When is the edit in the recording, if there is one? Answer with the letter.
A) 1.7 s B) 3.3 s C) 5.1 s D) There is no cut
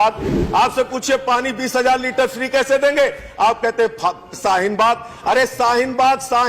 C